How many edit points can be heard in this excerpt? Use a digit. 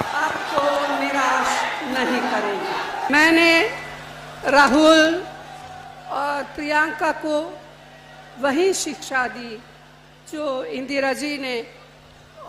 1